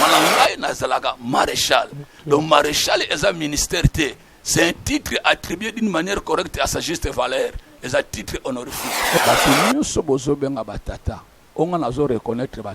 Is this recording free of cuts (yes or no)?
no